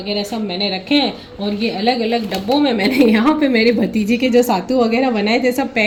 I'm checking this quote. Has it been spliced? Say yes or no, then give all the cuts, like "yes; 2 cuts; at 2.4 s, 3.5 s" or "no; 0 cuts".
no; 0 cuts